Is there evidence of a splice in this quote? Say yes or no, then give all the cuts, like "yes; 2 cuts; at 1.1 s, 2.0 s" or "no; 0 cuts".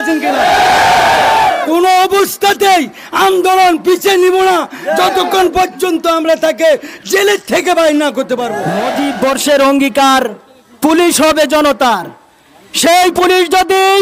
yes; 1 cut; at 8.8 s